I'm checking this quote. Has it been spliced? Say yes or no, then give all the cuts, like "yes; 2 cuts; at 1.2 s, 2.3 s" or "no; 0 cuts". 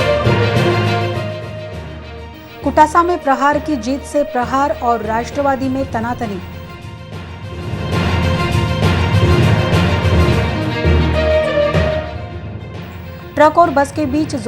yes; 1 cut; at 1.0 s